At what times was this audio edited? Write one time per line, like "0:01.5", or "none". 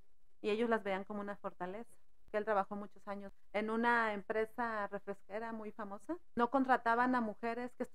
0:02.2
0:03.3
0:06.2